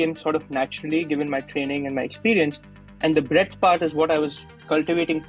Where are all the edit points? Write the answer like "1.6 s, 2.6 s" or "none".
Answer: none